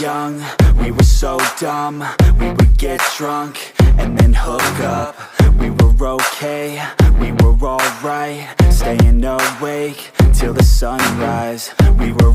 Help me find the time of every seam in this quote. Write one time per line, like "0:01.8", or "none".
none